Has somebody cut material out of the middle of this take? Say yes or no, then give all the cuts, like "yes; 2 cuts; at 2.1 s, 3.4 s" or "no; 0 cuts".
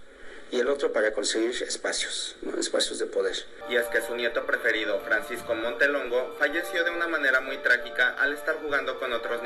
yes; 1 cut; at 3.5 s